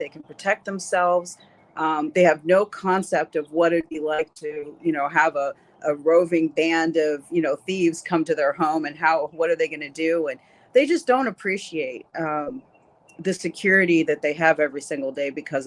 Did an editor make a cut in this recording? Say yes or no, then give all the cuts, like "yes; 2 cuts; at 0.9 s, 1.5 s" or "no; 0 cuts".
no; 0 cuts